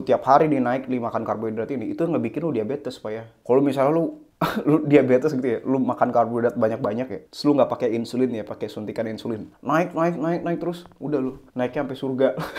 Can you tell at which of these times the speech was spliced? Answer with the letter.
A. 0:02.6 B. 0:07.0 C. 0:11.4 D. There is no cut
C